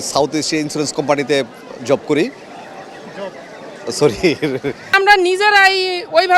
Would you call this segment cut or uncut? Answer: cut